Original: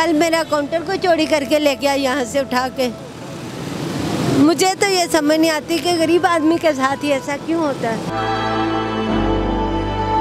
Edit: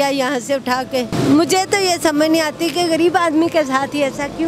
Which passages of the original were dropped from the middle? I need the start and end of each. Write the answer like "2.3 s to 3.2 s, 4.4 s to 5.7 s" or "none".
3.0 s to 4.2 s